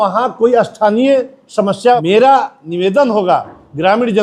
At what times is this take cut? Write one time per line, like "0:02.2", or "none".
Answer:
0:02.0